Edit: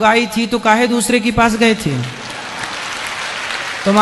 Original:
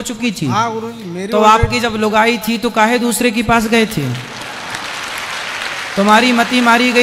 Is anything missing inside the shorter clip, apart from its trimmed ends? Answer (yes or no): no